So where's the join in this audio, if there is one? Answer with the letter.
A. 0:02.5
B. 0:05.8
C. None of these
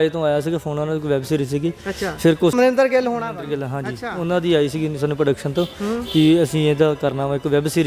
A